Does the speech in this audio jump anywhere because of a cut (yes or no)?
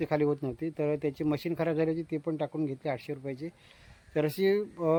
no